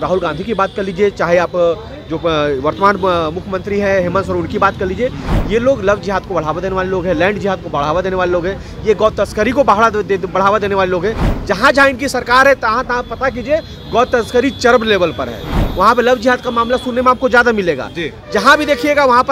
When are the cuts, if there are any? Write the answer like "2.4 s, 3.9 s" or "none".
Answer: none